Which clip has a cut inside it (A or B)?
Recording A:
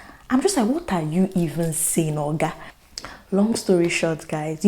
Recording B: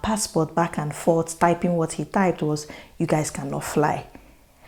A